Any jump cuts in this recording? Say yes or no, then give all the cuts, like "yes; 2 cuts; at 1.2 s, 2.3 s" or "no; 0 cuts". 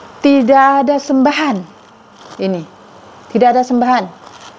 no; 0 cuts